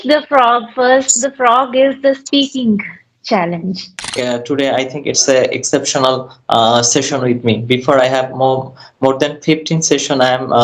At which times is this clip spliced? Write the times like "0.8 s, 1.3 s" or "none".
4.2 s